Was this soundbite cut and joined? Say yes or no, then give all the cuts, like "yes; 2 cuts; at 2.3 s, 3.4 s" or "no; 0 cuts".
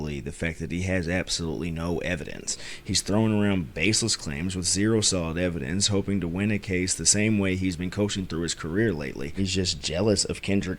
yes; 2 cuts; at 2.6 s, 9.3 s